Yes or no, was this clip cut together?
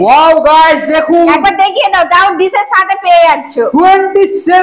no